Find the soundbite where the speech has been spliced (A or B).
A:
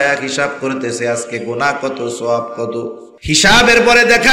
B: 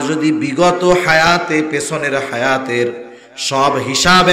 A